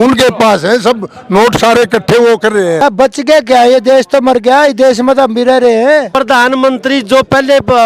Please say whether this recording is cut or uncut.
cut